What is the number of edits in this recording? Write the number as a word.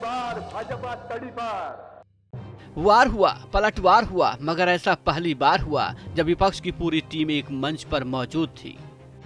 zero